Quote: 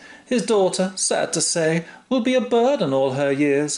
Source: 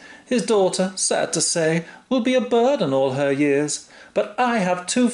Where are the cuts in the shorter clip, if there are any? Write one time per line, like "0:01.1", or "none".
none